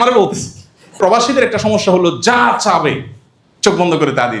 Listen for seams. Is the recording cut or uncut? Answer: cut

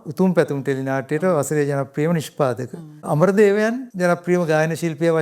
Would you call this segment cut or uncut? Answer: cut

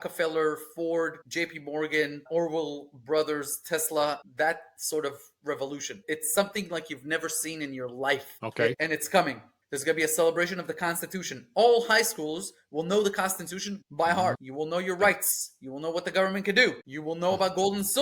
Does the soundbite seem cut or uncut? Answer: uncut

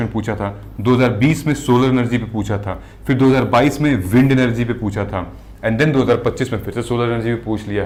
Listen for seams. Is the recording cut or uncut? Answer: uncut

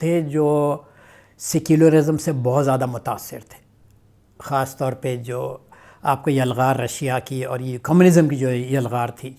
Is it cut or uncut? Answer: uncut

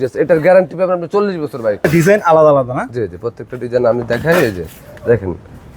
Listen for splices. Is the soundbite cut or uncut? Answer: cut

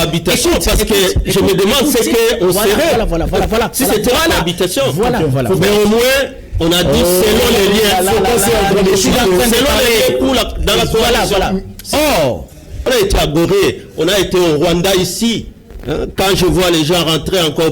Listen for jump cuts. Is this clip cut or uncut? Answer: cut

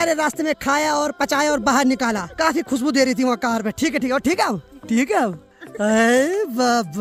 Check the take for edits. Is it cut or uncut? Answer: uncut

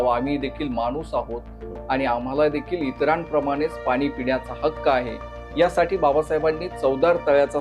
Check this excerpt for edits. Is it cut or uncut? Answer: uncut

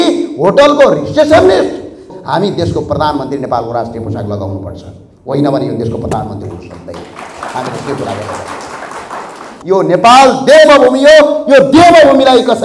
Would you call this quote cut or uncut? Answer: cut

